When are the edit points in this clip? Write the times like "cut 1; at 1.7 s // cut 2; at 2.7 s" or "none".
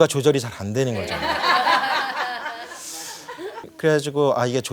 cut 1; at 3.7 s